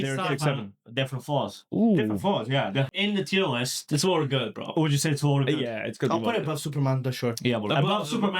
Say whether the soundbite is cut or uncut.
cut